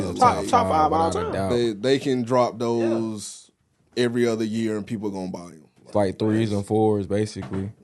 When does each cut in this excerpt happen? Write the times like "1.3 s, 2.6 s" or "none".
none